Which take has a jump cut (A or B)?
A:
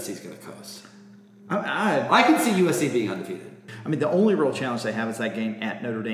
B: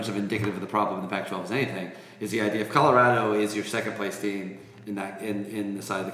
A